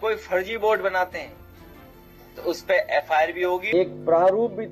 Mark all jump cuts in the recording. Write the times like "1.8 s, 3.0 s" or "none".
3.7 s